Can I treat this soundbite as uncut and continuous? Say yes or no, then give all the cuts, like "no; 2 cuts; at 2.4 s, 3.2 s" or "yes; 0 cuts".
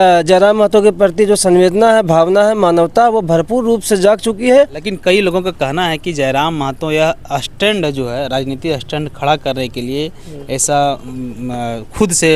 no; 1 cut; at 4.8 s